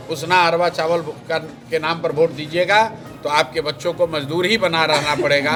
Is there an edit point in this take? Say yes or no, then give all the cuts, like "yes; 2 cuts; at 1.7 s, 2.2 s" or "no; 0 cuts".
no; 0 cuts